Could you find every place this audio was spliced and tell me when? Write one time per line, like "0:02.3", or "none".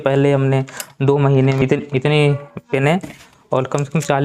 0:01.6